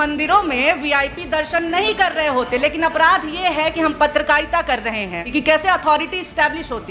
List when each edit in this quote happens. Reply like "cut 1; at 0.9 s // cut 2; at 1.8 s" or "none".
cut 1; at 5.2 s